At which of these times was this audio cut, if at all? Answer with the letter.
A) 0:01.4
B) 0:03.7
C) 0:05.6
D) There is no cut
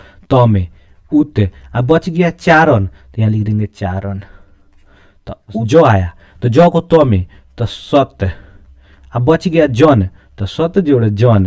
C